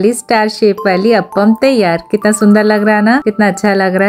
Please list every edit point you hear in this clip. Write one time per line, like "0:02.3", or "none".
none